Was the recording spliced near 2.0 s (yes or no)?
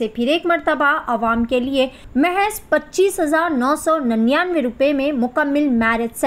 yes